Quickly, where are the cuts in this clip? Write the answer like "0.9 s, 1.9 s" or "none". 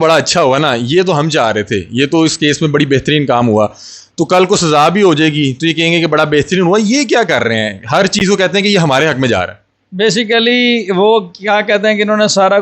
none